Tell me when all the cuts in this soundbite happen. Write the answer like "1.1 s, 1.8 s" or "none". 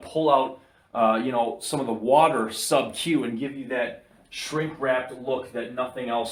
none